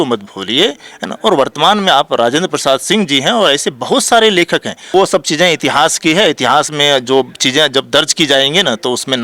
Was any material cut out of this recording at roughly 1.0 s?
no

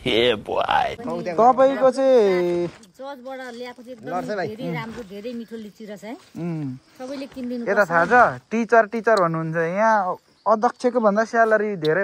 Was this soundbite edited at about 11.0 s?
no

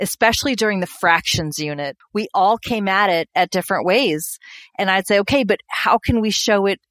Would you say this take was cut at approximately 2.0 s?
yes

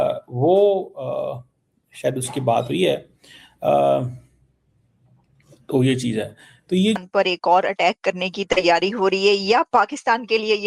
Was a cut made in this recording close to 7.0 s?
yes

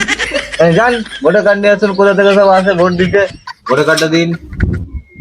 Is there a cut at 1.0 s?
no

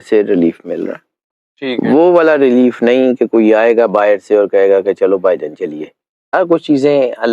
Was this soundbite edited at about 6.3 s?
yes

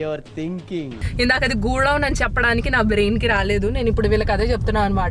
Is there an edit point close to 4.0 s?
no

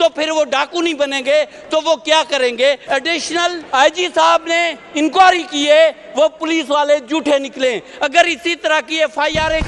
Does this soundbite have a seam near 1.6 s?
no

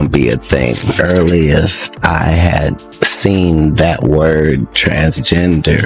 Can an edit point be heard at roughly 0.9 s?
yes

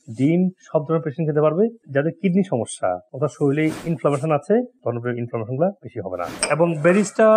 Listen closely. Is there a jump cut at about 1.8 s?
no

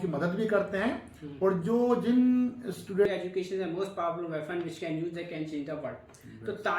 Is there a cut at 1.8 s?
no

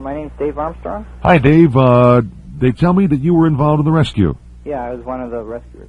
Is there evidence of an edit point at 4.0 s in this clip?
no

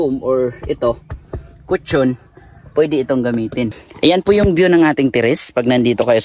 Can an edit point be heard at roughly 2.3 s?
no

